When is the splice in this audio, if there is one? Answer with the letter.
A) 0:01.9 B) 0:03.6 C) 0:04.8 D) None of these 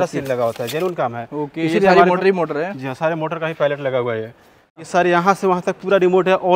C